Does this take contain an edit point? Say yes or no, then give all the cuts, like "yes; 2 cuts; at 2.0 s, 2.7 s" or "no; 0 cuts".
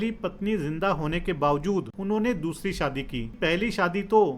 yes; 2 cuts; at 1.9 s, 3.3 s